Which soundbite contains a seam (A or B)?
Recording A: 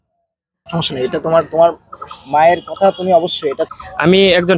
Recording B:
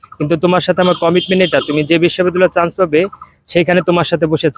A